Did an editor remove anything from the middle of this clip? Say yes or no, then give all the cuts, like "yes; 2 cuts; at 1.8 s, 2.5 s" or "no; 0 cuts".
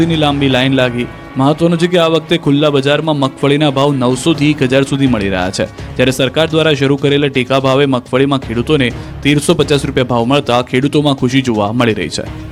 no; 0 cuts